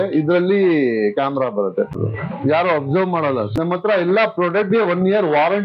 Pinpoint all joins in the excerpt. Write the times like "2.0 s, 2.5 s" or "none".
2.0 s, 3.5 s